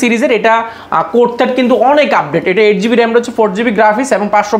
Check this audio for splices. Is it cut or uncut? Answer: uncut